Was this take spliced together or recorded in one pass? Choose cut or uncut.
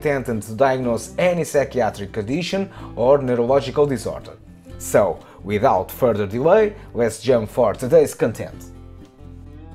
cut